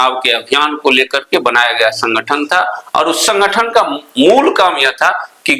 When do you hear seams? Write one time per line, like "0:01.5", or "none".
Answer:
none